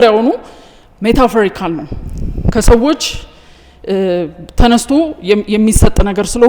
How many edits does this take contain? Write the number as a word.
zero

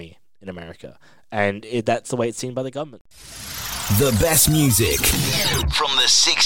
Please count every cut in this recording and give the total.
one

